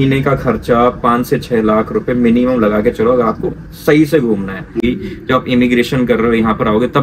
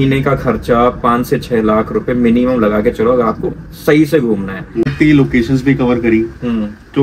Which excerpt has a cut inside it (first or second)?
first